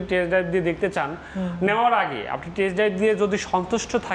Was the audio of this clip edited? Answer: no; 0 cuts

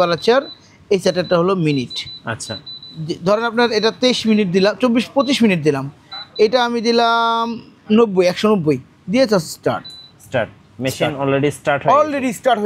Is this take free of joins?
yes; 0 cuts

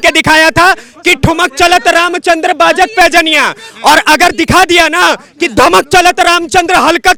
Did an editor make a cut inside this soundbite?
no; 0 cuts

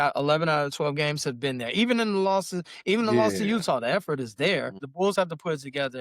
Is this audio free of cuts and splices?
no; 1 cut; at 4.8 s

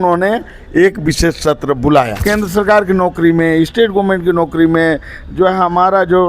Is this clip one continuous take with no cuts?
no; 1 cut; at 2.2 s

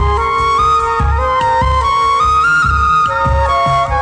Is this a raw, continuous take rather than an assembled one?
yes; 0 cuts

